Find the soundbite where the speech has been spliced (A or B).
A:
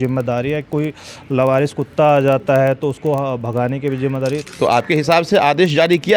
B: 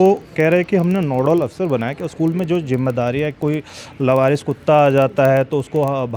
A